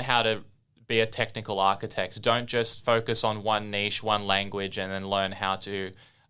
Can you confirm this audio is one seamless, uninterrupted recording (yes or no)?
yes